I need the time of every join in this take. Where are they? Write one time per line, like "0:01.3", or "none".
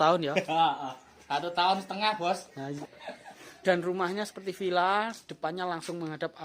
0:02.8